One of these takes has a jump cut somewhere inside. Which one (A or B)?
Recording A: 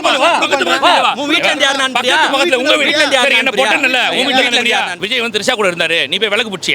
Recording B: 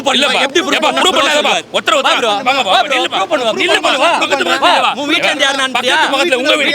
A